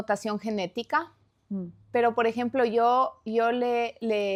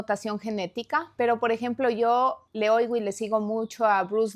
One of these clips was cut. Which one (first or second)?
second